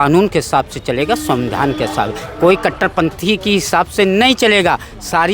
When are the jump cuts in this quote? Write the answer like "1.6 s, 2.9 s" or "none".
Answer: none